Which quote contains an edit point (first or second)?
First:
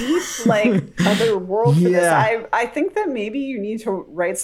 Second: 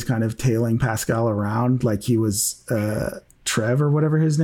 first